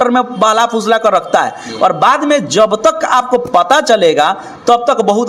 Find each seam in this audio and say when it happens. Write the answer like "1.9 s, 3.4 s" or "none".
none